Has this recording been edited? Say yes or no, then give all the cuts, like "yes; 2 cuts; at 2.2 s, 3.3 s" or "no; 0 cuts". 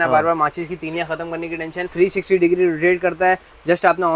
yes; 1 cut; at 1.9 s